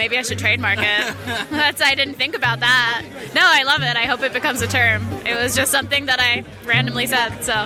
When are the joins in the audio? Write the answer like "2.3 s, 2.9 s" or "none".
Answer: none